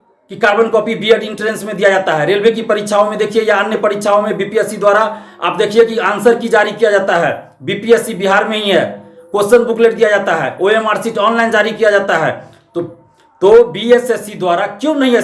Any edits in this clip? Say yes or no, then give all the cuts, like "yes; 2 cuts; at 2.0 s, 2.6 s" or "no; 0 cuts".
no; 0 cuts